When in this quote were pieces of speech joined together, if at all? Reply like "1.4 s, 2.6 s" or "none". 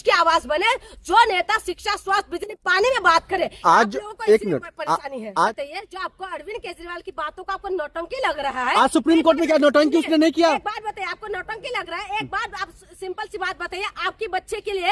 5.5 s